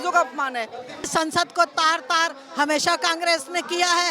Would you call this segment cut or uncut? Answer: cut